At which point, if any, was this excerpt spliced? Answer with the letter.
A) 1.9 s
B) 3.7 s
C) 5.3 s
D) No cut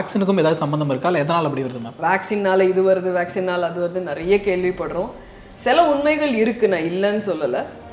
A